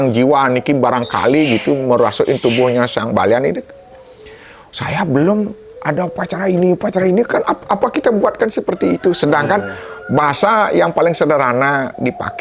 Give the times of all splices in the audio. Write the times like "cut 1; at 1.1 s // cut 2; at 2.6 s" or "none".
none